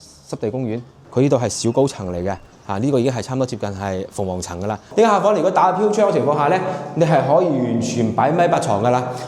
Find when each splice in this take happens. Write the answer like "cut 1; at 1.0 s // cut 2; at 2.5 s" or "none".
cut 1; at 1.0 s // cut 2; at 4.8 s